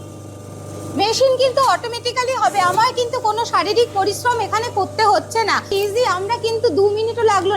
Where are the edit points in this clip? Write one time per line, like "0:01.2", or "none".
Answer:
0:05.7